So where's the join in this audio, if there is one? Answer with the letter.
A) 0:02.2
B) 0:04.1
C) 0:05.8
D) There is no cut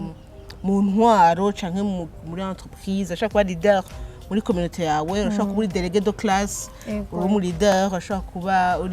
D